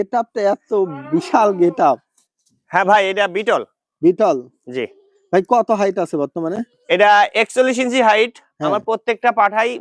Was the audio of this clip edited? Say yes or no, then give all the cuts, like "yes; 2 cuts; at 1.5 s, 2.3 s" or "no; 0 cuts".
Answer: no; 0 cuts